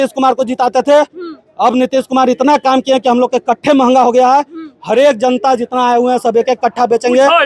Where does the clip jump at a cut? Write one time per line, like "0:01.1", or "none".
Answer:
none